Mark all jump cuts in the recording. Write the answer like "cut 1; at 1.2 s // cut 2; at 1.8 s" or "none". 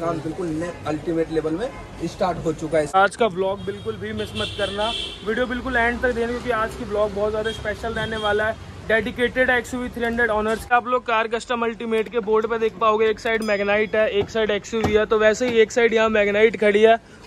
cut 1; at 3.0 s // cut 2; at 10.7 s